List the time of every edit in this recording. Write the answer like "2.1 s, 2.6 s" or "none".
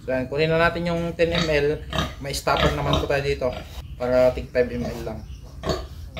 3.7 s